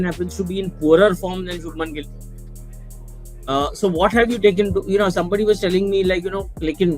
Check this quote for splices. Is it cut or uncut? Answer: uncut